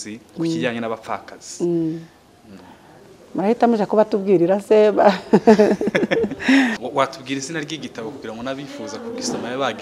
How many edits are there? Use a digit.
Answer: 1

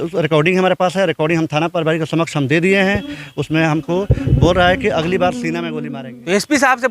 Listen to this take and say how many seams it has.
1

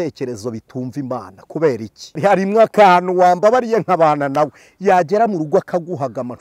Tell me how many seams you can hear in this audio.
1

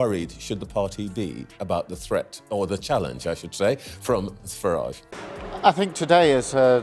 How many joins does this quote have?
1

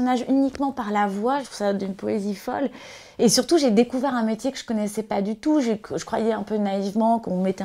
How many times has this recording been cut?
1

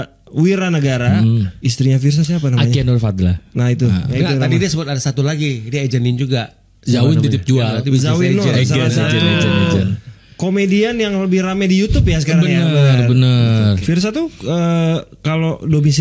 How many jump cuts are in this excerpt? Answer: 3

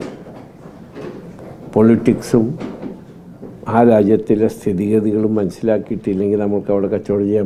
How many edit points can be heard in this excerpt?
0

